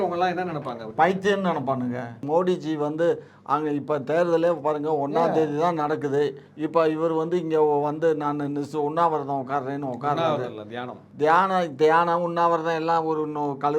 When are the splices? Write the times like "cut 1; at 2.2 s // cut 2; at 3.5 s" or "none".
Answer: cut 1; at 2.2 s

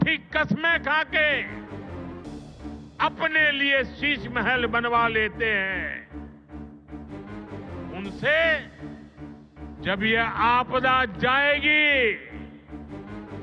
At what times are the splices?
none

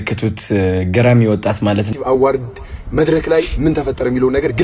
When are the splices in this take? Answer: cut 1; at 1.9 s

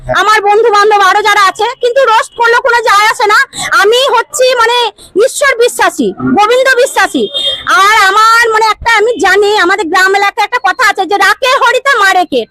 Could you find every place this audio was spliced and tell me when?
none

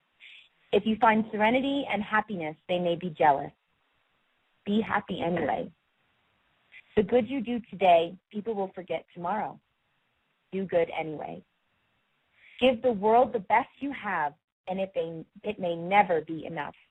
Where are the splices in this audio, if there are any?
none

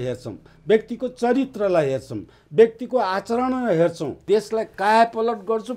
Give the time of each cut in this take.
cut 1; at 4.1 s

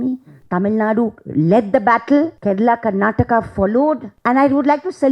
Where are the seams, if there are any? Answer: cut 1; at 2.4 s // cut 2; at 4.1 s

